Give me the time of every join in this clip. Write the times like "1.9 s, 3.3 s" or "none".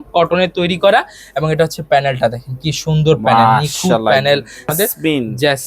4.7 s